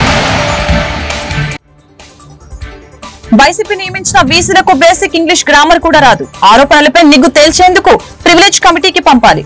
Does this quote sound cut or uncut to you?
cut